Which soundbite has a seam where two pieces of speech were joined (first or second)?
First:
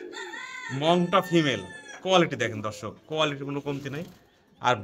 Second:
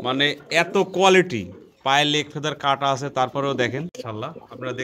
second